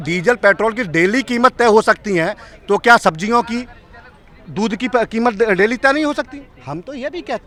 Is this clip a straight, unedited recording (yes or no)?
yes